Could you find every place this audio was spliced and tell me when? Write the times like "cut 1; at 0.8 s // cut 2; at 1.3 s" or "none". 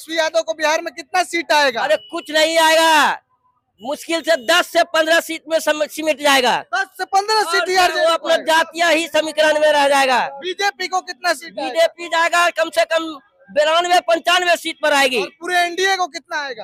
none